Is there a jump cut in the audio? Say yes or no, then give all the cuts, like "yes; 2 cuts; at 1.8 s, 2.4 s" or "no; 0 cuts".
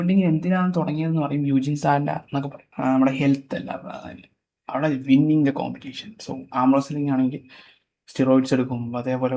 yes; 1 cut; at 2.6 s